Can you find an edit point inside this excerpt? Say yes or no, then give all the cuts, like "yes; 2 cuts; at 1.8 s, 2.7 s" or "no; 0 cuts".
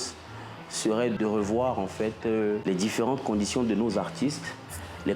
yes; 2 cuts; at 1.2 s, 2.6 s